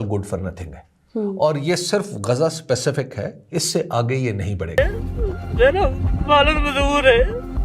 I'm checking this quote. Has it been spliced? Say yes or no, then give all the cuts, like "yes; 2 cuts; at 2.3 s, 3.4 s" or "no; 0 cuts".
yes; 1 cut; at 4.8 s